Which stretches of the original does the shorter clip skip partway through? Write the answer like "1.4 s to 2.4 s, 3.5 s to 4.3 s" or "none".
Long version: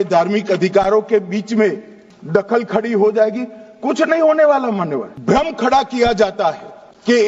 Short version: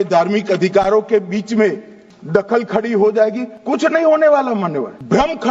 3.5 s to 3.7 s